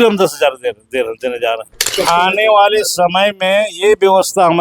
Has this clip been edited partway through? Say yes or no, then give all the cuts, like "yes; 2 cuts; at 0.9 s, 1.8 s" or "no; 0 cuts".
yes; 1 cut; at 1.9 s